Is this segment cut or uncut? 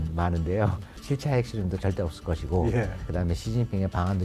cut